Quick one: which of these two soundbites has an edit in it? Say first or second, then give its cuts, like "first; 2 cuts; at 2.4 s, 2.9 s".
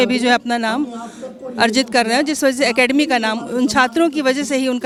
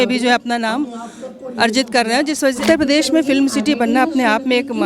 second; 1 cut; at 2.6 s